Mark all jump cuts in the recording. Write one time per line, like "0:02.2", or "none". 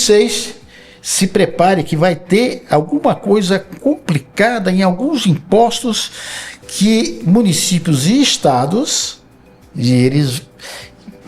none